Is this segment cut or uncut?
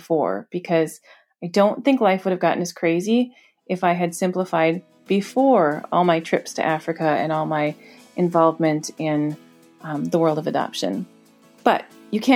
uncut